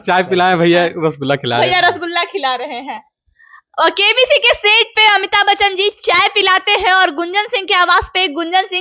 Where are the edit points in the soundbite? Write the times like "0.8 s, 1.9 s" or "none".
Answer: none